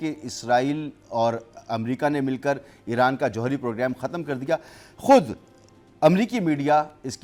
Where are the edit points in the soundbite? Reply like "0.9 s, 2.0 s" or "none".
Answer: none